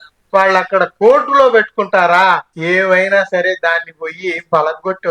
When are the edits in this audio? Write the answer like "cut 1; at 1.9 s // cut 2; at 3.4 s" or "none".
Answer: cut 1; at 2.5 s